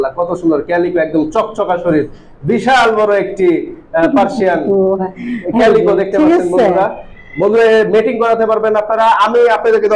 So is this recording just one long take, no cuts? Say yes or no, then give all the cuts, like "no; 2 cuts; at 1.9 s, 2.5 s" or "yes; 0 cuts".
yes; 0 cuts